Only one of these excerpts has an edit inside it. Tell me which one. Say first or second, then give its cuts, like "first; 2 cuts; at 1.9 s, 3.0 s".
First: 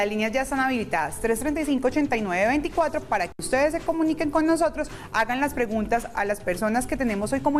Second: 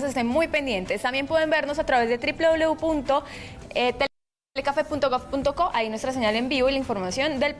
second; 1 cut; at 2.3 s